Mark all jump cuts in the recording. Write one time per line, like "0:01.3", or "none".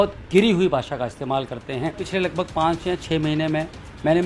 0:02.0